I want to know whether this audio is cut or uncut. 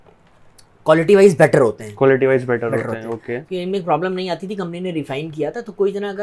uncut